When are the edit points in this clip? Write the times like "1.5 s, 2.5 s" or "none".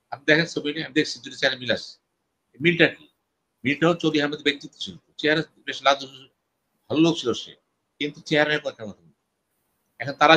none